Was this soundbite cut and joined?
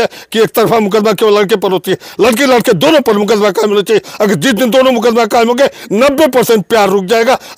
no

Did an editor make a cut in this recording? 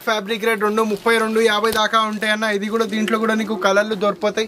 no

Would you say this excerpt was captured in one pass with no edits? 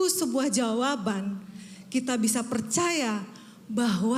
yes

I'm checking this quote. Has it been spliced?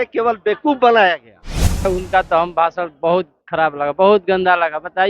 yes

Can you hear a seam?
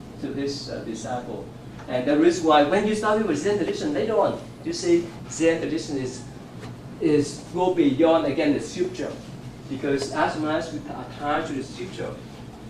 no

